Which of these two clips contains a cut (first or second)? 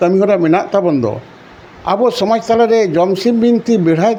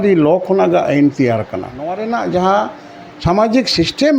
second